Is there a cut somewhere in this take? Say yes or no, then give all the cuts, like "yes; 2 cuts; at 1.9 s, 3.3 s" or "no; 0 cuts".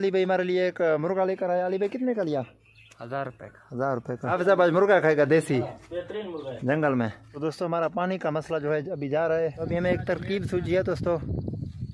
yes; 2 cuts; at 4.3 s, 7.2 s